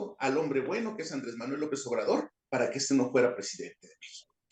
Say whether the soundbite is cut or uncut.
uncut